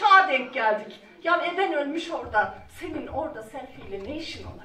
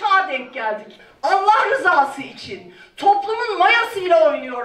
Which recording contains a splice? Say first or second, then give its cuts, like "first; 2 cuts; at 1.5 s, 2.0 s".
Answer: second; 1 cut; at 1.0 s